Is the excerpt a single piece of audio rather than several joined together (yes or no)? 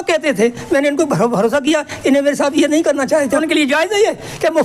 no